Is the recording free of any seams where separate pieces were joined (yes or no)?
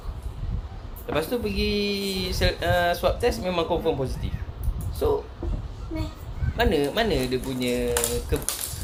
yes